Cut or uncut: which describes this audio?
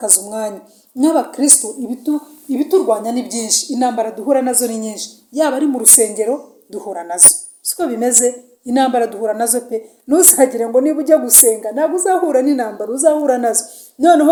uncut